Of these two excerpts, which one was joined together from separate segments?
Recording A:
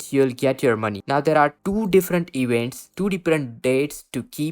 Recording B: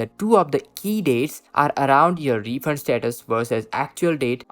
A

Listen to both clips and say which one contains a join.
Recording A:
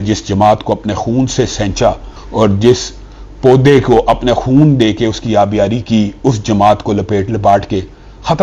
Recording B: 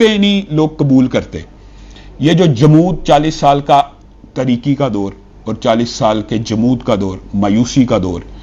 A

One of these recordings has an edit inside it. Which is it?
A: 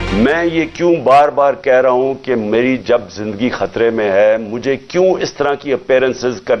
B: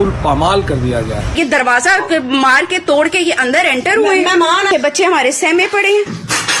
B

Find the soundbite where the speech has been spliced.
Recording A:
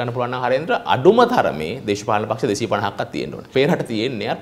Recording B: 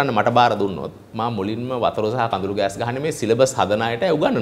A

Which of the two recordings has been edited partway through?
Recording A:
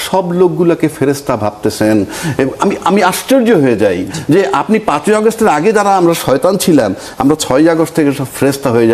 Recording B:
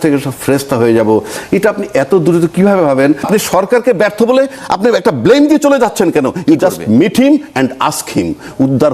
B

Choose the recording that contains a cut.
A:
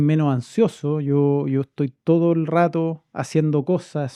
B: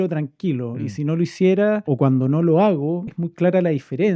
B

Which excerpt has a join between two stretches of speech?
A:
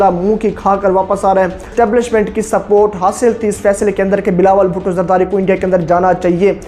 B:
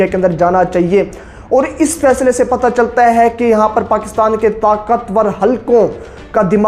A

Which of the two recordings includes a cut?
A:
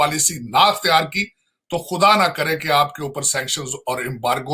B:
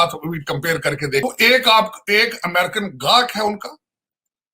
B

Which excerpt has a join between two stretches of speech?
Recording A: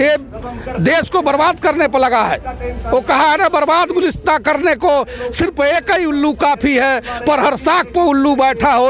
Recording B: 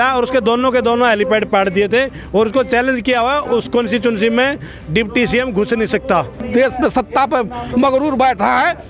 B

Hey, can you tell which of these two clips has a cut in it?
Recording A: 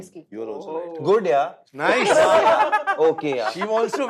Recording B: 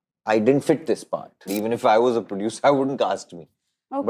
B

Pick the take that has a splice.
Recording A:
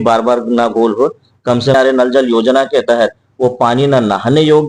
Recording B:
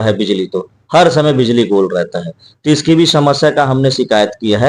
A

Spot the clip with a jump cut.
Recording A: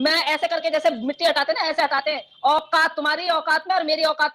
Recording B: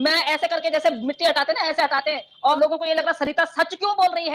B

